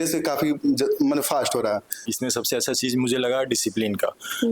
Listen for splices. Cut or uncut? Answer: cut